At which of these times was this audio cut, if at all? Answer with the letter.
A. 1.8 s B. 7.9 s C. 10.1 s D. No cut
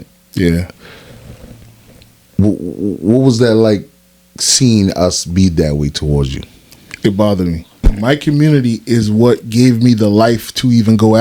B